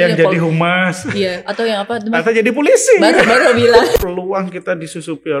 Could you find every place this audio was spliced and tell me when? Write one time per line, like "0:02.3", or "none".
0:04.0

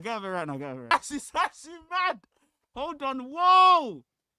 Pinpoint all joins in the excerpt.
0:00.9

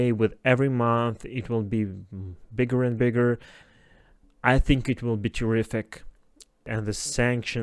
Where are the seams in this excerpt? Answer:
0:03.6
0:06.6

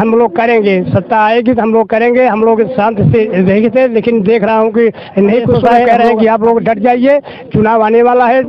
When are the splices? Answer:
0:05.9

